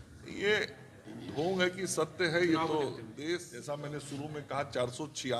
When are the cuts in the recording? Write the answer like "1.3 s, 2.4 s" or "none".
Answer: 3.5 s